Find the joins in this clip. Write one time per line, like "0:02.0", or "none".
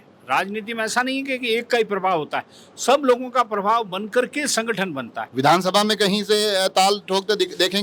0:05.2

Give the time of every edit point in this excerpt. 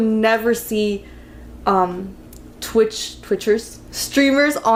none

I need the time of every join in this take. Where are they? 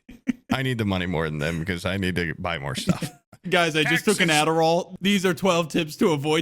0:03.3
0:04.9

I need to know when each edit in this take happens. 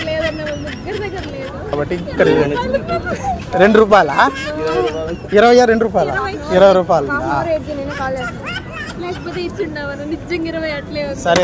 0:01.7

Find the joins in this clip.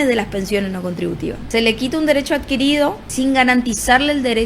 0:01.4
0:03.1

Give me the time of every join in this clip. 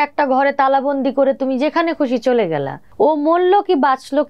0:02.8

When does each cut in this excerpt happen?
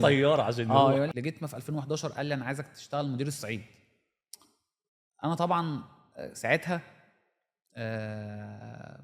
0:01.1

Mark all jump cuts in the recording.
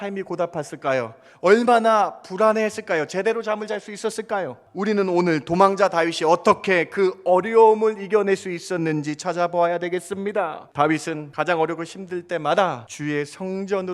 0:04.6
0:10.6
0:11.3
0:12.9

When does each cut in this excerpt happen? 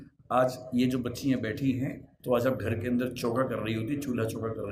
0:02.1

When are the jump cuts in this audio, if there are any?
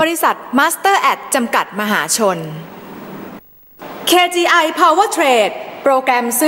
0:03.4

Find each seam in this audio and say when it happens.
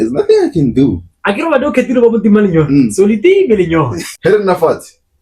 0:04.0

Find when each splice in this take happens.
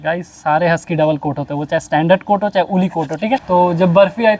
0:03.4

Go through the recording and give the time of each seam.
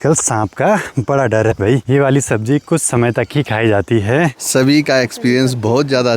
0:01.8
0:04.4

